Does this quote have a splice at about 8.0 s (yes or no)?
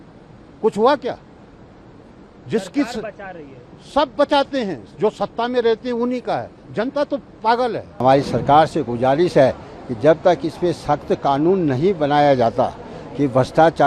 yes